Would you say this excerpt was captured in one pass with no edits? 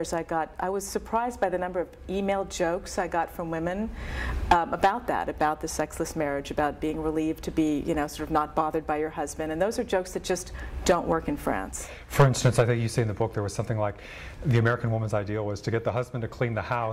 yes; 0 cuts

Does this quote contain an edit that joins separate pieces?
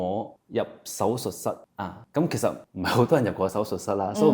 no; 0 cuts

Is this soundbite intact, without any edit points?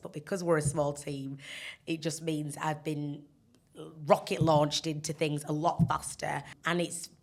yes; 0 cuts

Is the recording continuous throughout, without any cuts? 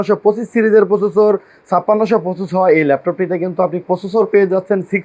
yes; 0 cuts

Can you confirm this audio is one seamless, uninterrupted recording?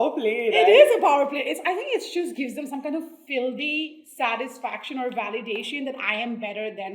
yes; 0 cuts

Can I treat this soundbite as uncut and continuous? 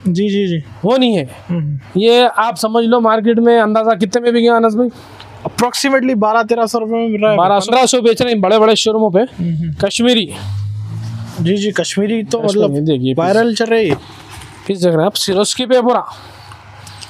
no; 1 cut; at 7.6 s

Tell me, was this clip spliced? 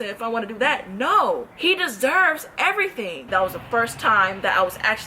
yes; 2 cuts; at 1.5 s, 3.2 s

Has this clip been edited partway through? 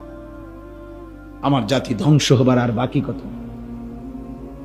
yes; 2 cuts; at 1.2 s, 3.6 s

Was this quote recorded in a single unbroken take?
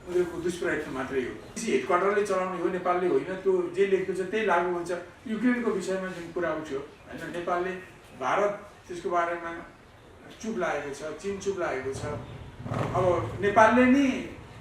no; 2 cuts; at 1.5 s, 5.1 s

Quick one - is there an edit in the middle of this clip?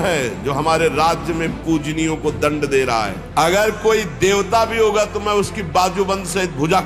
yes; 1 cut; at 3.2 s

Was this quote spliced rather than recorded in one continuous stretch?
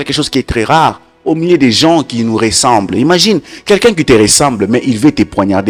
no; 0 cuts

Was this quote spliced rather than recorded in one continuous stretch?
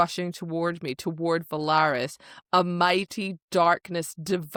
no; 0 cuts

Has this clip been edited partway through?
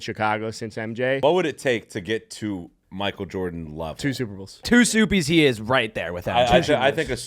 yes; 2 cuts; at 1.2 s, 4.7 s

